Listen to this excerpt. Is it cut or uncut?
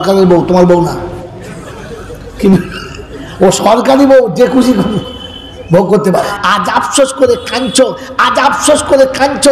cut